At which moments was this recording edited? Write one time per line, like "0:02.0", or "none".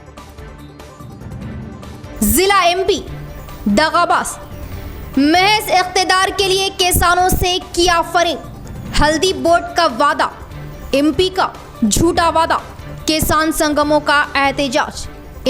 0:02.2